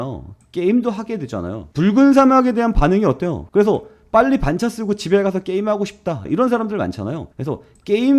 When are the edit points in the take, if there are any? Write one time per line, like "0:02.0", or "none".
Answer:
0:01.6
0:03.4
0:06.2

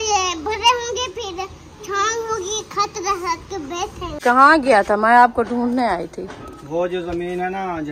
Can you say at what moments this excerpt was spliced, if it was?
0:04.2

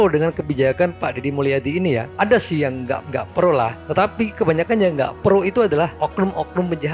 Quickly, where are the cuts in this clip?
none

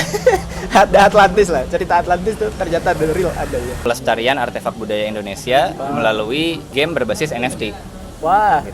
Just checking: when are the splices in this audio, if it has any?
0:03.8
0:06.6

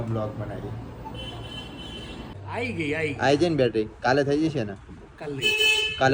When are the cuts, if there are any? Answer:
0:02.4

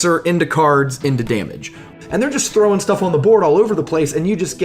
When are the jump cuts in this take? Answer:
0:01.9

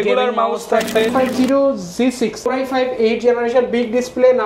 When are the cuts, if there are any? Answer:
0:01.1
0:02.4

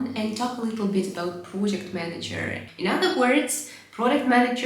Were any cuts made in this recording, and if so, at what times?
0:02.6

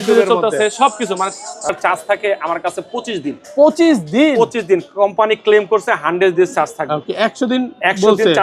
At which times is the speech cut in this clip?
0:01.7

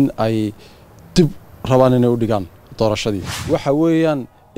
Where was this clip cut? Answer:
0:03.3

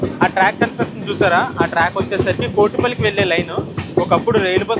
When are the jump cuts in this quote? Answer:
none

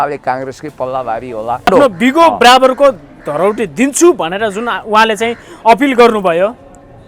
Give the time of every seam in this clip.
0:01.7

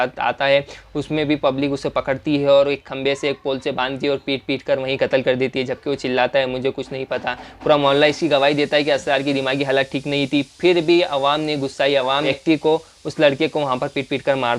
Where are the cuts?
0:12.3

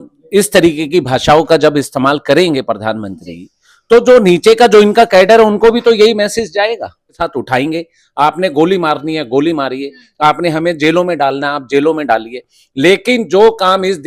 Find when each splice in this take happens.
0:07.1

